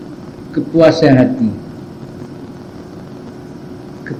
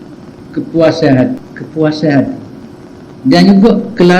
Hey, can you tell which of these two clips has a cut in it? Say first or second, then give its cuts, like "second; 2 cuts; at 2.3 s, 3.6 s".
second; 1 cut; at 1.4 s